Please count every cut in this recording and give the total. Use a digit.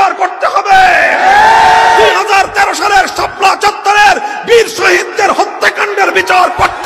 0